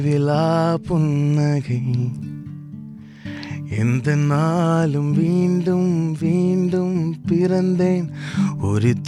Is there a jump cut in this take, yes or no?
no